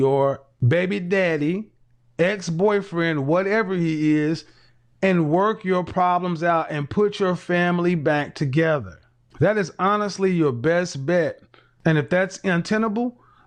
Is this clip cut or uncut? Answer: uncut